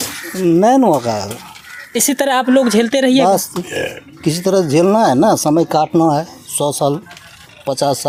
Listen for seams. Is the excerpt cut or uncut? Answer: uncut